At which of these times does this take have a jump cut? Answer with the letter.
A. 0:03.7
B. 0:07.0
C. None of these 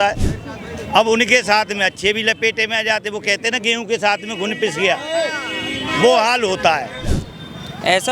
B